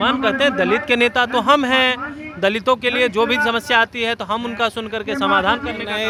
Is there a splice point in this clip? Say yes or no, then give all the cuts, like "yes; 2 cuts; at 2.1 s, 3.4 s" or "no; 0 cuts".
no; 0 cuts